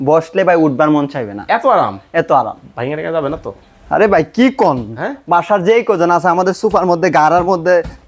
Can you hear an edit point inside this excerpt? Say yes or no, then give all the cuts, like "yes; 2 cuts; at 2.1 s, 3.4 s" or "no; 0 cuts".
no; 0 cuts